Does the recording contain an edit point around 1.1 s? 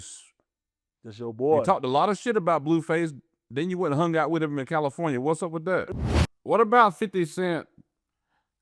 no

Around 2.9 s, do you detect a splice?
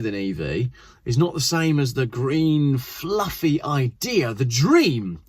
no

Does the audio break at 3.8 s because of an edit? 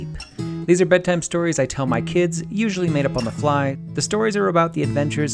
yes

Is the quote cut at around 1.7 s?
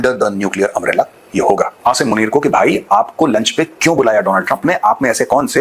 yes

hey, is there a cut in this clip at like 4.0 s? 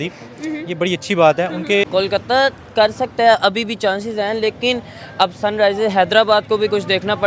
no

